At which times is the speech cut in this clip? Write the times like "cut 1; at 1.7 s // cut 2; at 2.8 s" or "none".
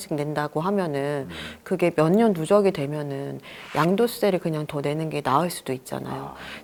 none